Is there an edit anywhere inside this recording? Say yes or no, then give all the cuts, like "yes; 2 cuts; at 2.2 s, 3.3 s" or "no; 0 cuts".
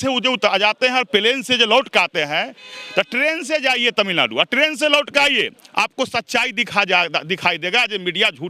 no; 0 cuts